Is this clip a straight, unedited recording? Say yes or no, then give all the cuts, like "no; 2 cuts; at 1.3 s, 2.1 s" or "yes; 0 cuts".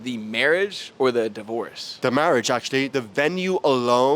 no; 2 cuts; at 1.9 s, 2.9 s